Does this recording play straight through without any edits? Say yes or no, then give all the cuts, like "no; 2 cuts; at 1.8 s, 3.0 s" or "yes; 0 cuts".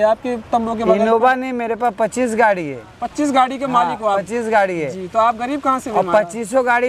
yes; 0 cuts